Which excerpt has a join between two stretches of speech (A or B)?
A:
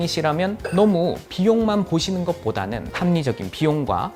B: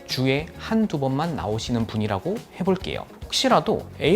B